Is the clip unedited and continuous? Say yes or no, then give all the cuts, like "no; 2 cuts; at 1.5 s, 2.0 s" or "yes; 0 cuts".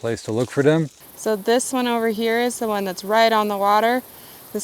no; 1 cut; at 1.0 s